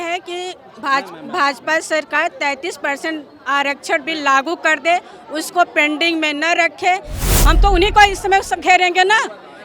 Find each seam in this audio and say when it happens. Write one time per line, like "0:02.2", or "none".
0:07.1